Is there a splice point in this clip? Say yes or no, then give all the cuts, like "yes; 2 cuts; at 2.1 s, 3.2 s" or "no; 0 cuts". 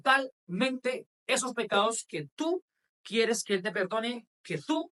no; 0 cuts